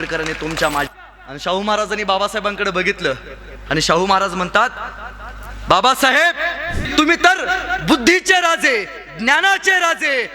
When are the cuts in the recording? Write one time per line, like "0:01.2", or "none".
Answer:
0:00.9
0:06.8